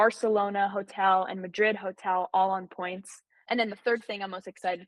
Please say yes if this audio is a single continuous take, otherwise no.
no